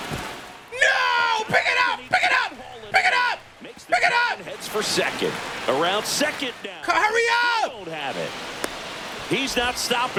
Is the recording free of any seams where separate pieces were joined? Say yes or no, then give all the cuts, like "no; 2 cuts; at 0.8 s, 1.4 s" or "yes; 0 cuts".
yes; 0 cuts